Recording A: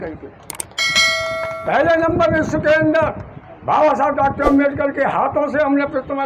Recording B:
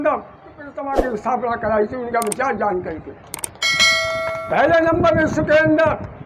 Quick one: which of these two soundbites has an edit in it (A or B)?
B